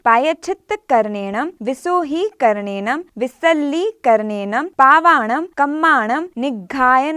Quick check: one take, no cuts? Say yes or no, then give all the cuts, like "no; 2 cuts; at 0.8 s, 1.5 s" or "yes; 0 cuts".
no; 5 cuts; at 1.5 s, 3.1 s, 4.7 s, 5.5 s, 6.3 s